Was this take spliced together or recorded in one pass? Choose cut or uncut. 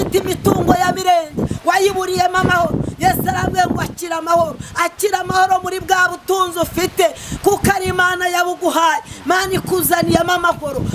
uncut